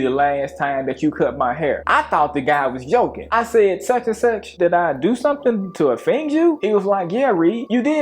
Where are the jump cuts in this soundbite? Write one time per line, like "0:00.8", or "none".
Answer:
0:03.2
0:04.5